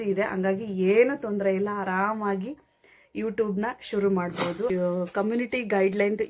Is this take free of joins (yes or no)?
no